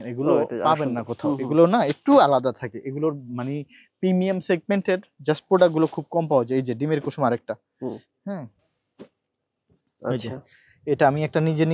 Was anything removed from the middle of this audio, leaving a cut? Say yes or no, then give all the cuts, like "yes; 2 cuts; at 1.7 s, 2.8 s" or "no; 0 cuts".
no; 0 cuts